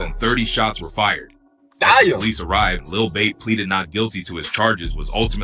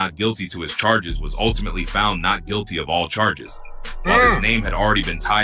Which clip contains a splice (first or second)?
first